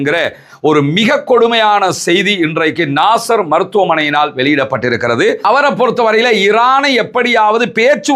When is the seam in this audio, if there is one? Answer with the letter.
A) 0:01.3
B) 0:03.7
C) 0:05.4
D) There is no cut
C